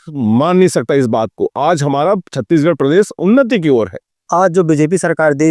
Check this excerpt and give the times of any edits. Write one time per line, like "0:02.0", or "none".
0:04.2